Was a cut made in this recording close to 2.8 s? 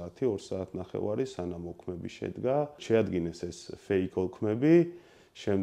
yes; 1 cut; at 2.8 s

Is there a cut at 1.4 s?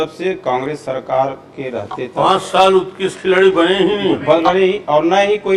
no; 0 cuts

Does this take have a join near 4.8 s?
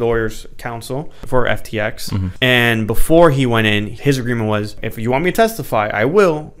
yes; 4 cuts; at 1.2 s, 2.3 s, 3.9 s, 4.8 s

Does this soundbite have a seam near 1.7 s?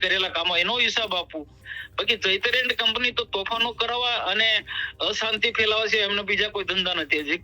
yes; 1 cut; at 1.7 s

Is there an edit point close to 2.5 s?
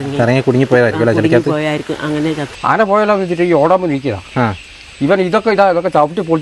yes; 1 cut; at 2.5 s

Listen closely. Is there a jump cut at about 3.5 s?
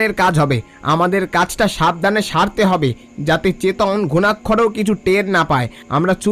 no; 0 cuts

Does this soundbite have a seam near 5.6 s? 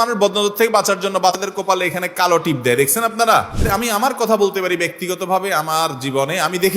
no; 2 cuts; at 1.4 s, 3.7 s

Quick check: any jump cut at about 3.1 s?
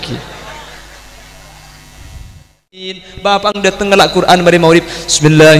yes; 1 cut; at 3.1 s

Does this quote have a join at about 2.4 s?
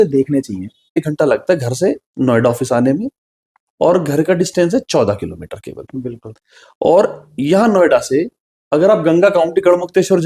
no; 1 cut; at 1.0 s

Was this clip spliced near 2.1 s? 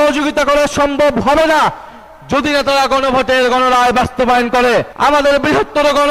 no; 1 cut; at 4.9 s

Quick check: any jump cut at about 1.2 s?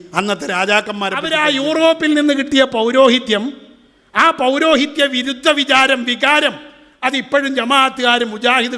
yes; 1 cut; at 1.2 s

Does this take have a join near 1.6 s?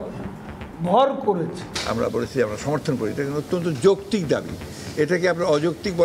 yes; 1 cut; at 1.6 s

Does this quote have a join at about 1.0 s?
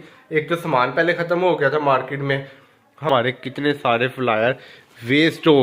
no; 1 cut; at 3.1 s

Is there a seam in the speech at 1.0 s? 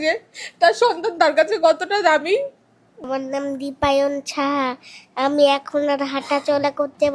no; 1 cut; at 3.1 s

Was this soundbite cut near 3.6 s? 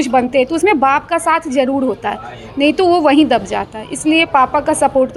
no; 0 cuts

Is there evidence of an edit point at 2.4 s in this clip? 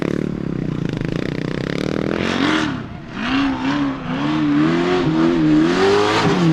yes; 1 cut; at 2.4 s

